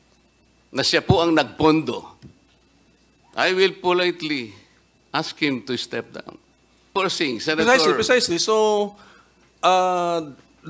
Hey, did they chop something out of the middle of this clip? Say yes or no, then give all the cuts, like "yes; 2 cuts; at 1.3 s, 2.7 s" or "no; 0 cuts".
yes; 1 cut; at 6.9 s